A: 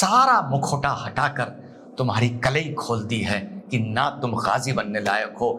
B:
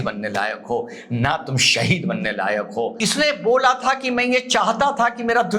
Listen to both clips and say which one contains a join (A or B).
B